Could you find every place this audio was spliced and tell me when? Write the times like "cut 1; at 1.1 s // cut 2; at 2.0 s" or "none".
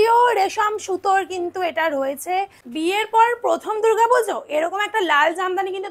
cut 1; at 2.6 s